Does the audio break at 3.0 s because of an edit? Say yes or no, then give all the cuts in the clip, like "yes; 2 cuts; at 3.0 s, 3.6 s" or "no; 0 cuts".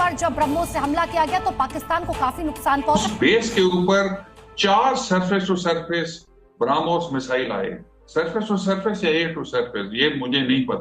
yes; 1 cut; at 3.0 s